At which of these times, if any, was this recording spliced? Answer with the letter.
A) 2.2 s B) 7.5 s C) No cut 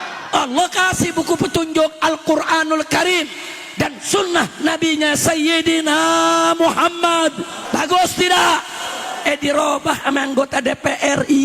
B